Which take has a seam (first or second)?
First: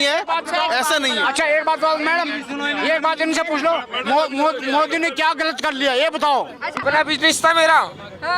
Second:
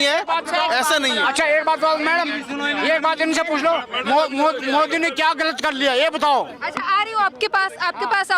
first